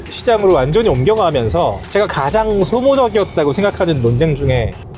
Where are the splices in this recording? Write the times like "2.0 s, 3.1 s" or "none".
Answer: none